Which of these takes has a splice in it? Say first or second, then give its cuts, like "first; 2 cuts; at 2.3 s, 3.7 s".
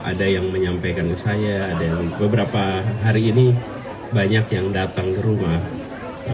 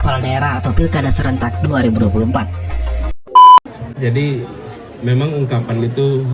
second; 1 cut; at 3.2 s